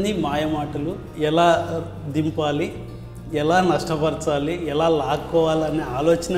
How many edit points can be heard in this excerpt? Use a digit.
1